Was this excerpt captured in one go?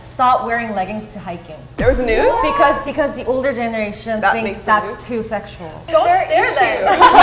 no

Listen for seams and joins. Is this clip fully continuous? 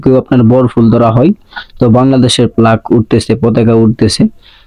yes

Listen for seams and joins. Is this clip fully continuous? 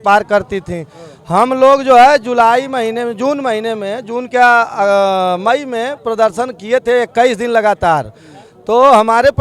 yes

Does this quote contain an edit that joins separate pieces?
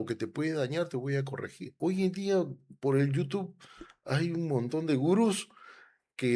yes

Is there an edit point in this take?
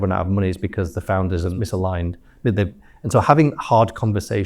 yes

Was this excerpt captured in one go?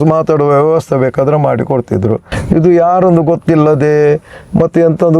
yes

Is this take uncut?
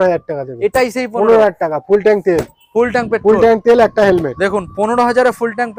yes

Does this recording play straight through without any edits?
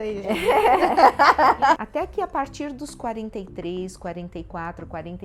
no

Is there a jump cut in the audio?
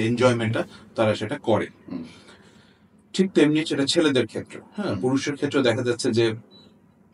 no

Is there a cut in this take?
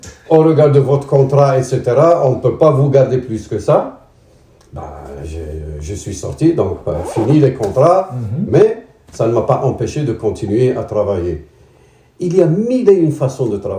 no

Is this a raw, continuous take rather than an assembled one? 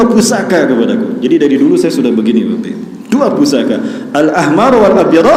yes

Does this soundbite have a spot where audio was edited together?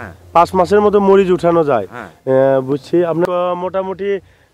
yes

